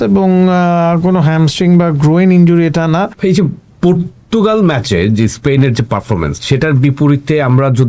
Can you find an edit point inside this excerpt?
yes; 1 cut; at 3.1 s

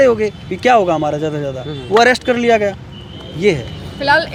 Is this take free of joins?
yes; 0 cuts

